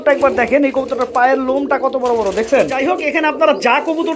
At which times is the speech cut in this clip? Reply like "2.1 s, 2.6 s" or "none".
2.8 s